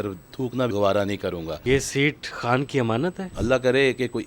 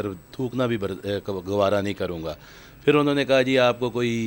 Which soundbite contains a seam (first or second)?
first